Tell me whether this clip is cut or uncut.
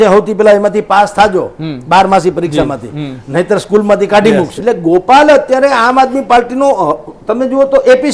cut